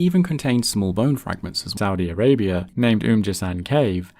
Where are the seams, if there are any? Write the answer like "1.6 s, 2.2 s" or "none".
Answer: 1.7 s